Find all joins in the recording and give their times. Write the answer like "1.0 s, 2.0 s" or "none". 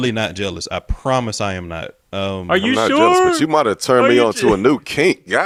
none